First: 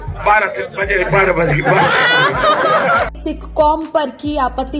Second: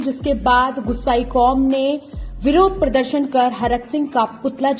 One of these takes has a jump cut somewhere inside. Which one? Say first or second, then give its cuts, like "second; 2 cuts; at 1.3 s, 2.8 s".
first; 2 cuts; at 1.5 s, 3.2 s